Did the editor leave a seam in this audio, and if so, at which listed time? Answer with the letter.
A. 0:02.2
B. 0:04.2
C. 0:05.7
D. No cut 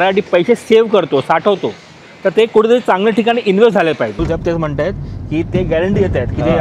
B